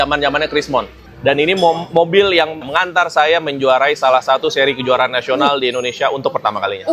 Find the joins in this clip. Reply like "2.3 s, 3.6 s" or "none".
1.0 s, 2.7 s